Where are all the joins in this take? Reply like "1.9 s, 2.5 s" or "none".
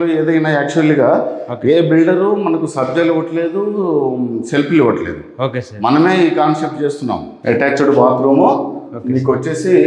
7.3 s